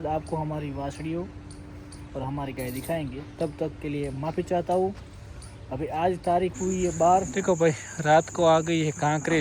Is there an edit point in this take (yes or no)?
yes